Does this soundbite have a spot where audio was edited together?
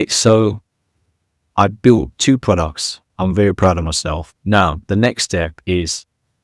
no; 0 cuts

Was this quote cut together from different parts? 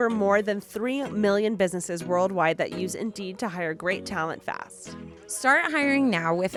no; 0 cuts

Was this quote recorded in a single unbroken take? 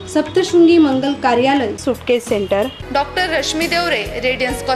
yes; 0 cuts

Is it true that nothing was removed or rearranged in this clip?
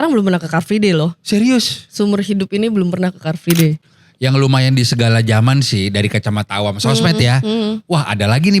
no; 1 cut; at 3.8 s

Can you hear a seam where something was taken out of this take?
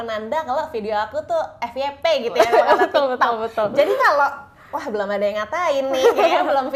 no; 0 cuts

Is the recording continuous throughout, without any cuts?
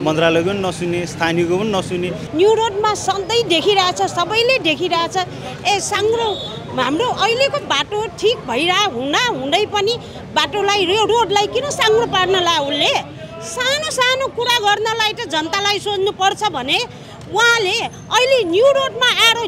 yes; 0 cuts

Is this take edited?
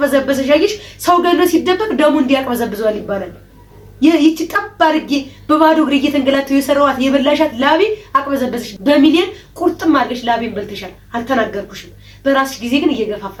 no; 0 cuts

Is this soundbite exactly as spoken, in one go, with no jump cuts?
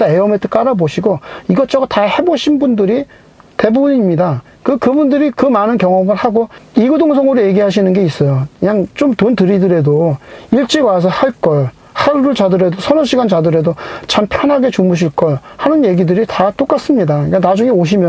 yes; 0 cuts

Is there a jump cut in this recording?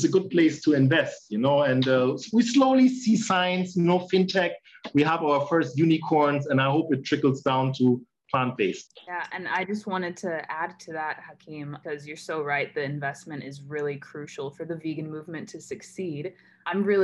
no; 0 cuts

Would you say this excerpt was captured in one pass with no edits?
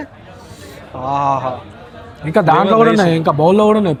yes; 0 cuts

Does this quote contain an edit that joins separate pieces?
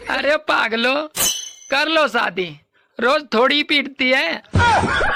no; 0 cuts

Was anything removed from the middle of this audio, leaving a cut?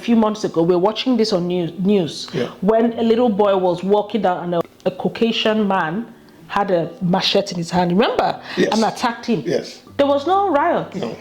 yes; 1 cut; at 4.6 s

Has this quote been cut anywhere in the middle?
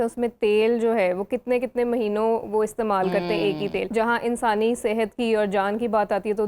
yes; 1 cut; at 3.9 s

